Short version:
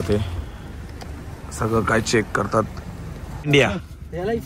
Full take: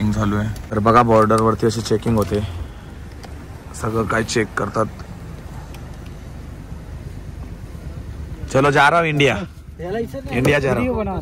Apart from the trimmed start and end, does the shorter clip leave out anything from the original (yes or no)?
yes